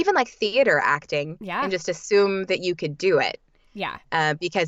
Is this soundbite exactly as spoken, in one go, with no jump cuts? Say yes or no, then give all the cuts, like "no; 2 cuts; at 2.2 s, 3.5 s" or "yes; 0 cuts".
yes; 0 cuts